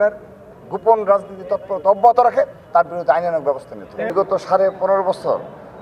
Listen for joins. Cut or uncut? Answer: cut